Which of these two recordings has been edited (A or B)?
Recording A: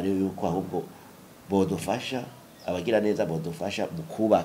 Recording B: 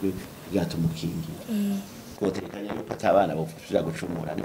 B